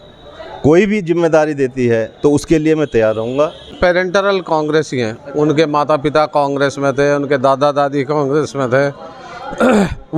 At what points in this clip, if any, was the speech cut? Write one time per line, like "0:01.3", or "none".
0:03.8